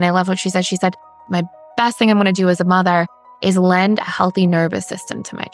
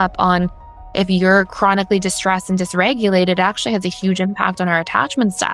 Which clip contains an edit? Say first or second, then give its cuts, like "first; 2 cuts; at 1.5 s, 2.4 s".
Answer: first; 1 cut; at 1.3 s